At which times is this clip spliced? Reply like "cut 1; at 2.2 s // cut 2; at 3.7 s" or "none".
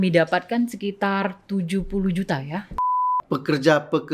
cut 1; at 2.9 s